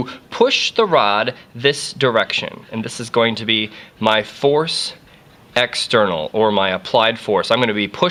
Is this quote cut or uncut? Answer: uncut